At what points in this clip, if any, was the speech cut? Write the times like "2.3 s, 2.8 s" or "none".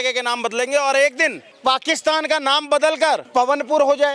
1.5 s, 3.3 s